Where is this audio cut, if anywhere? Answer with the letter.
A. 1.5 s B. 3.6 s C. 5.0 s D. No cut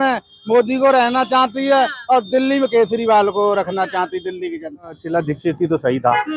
C